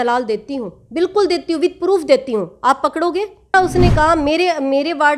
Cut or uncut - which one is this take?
cut